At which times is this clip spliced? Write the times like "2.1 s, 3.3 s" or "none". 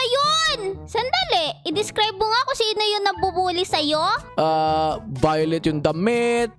0.8 s, 4.3 s